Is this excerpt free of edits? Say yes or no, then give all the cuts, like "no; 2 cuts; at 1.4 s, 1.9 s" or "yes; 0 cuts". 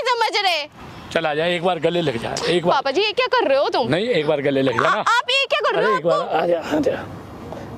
yes; 0 cuts